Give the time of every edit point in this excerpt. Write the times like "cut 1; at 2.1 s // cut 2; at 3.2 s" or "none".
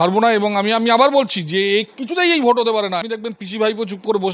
cut 1; at 3.1 s